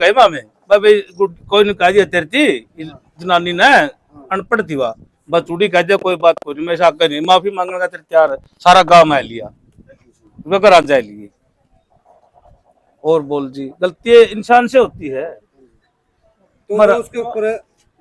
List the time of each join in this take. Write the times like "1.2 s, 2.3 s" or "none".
none